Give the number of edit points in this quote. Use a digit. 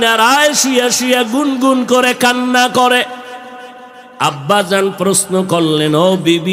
0